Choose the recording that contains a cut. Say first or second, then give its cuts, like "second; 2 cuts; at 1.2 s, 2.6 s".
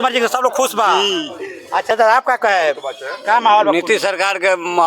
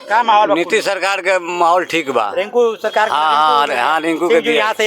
first; 1 cut; at 1.9 s